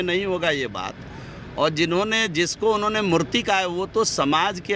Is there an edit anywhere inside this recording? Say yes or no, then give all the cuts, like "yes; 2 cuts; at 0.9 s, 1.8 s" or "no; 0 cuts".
no; 0 cuts